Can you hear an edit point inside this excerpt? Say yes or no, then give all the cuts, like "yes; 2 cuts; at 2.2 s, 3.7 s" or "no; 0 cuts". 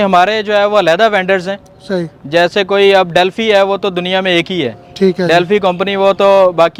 no; 0 cuts